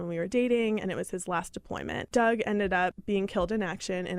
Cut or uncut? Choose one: cut